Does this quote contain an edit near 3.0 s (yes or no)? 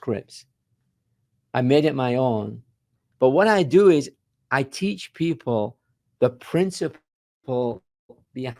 yes